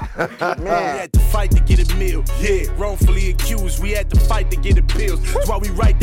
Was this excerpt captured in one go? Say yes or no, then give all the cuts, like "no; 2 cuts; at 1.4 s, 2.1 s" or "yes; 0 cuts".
no; 1 cut; at 1.0 s